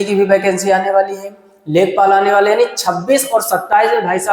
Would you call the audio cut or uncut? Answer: uncut